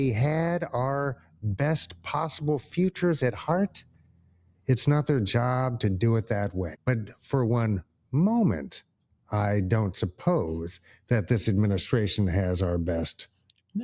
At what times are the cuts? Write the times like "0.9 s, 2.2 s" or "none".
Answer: 6.7 s